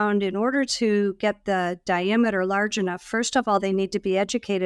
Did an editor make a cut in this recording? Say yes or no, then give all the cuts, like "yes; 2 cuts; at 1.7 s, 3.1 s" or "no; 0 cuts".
no; 0 cuts